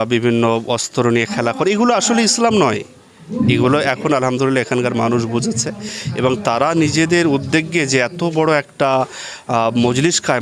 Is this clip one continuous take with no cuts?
yes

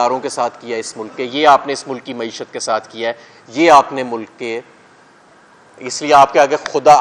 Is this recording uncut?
yes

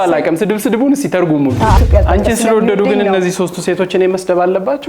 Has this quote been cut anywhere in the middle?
yes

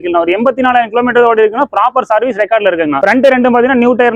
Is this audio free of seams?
yes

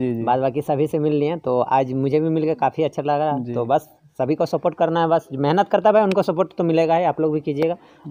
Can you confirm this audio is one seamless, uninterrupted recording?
yes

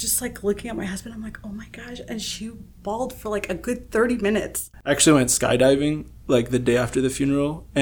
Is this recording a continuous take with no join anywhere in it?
no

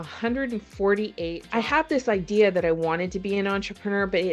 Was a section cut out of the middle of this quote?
yes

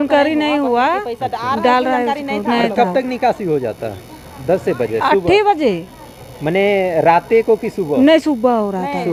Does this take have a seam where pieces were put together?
no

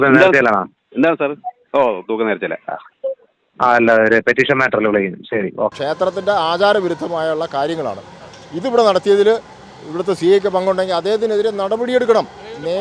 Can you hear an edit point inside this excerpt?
yes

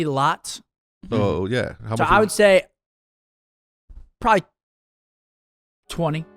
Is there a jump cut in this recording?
yes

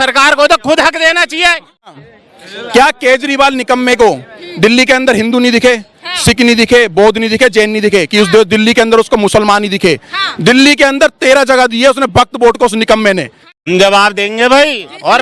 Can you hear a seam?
yes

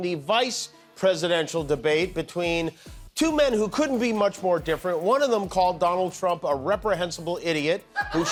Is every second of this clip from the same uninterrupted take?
yes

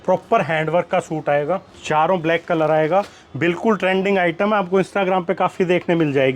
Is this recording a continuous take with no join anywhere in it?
no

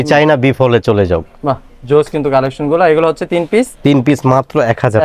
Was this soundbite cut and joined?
no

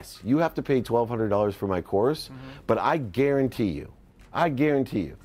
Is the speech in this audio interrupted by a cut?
no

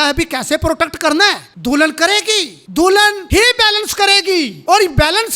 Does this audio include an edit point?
yes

